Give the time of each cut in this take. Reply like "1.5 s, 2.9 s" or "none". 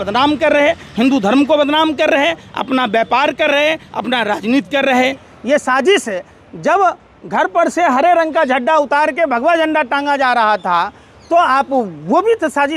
5.3 s